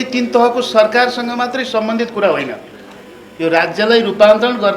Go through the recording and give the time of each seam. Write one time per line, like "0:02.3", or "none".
none